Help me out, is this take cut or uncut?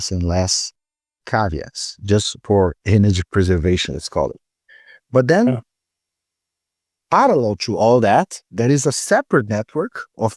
uncut